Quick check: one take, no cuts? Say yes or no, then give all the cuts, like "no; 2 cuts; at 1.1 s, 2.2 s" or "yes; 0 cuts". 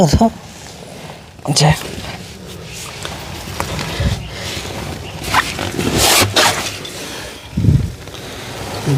yes; 0 cuts